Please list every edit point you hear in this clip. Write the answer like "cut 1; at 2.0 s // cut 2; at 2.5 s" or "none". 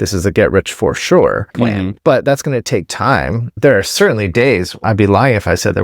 cut 1; at 1.6 s // cut 2; at 3.6 s // cut 3; at 4.8 s